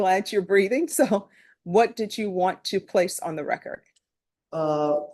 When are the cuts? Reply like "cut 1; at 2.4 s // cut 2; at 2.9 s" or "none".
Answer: none

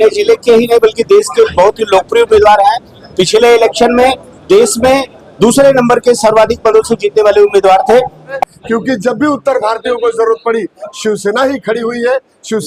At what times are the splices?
cut 1; at 8.4 s

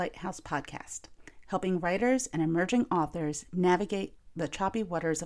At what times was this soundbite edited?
cut 1; at 4.2 s

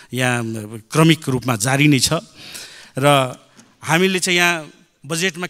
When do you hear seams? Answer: none

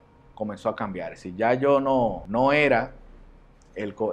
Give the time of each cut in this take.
cut 1; at 2.2 s

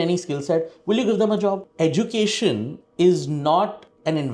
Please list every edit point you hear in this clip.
cut 1; at 1.7 s

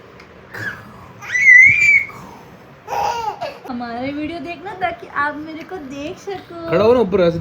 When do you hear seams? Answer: cut 1; at 3.7 s

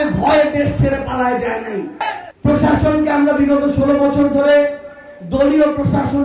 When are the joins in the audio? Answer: cut 1; at 2.0 s

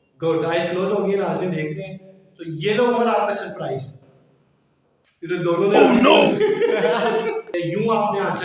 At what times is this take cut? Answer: cut 1; at 7.5 s

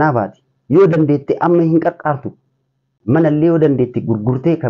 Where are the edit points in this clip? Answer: cut 1; at 2.9 s

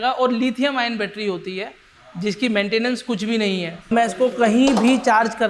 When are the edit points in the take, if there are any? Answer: cut 1; at 3.9 s

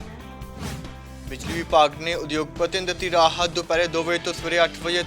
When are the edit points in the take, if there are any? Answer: cut 1; at 1.0 s

